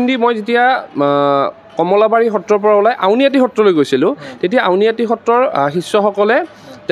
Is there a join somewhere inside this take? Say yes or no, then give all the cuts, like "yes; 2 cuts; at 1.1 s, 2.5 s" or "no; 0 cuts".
no; 0 cuts